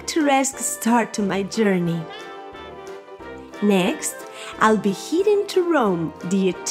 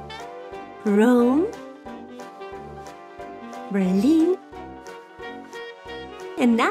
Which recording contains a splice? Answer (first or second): second